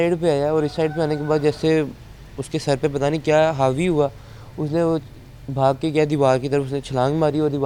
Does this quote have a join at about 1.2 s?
no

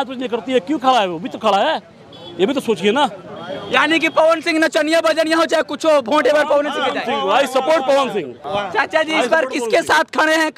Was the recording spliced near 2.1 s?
no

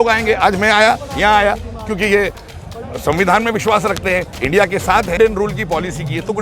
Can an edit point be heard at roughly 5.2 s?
yes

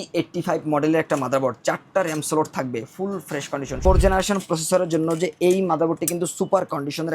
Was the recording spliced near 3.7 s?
yes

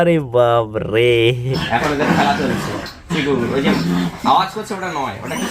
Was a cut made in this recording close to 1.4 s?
yes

